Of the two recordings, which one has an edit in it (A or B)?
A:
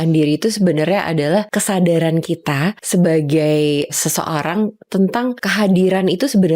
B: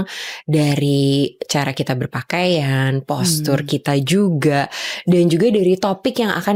A